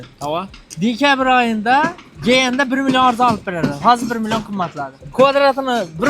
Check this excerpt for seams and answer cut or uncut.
cut